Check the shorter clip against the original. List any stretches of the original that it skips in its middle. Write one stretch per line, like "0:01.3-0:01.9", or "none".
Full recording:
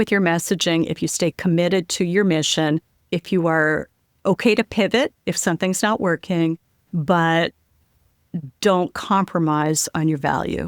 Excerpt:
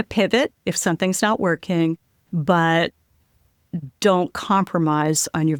none